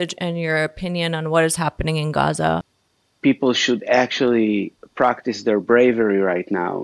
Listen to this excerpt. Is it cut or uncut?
cut